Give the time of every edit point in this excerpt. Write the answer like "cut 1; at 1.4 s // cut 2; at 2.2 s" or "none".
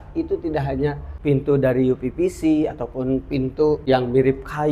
cut 1; at 1.1 s // cut 2; at 3.8 s